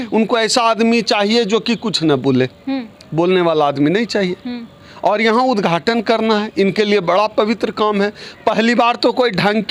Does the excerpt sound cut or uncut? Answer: uncut